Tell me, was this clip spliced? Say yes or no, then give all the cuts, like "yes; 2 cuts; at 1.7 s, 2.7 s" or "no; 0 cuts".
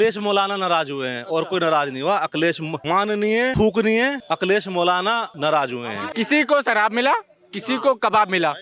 yes; 4 cuts; at 3.0 s, 4.2 s, 5.3 s, 6.0 s